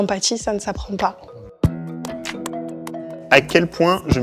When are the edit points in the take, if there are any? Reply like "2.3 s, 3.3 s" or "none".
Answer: none